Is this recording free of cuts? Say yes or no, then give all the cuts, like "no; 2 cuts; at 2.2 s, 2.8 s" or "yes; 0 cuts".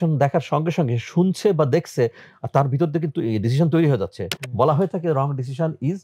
yes; 0 cuts